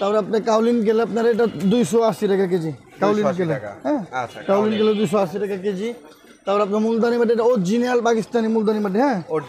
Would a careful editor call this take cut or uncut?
uncut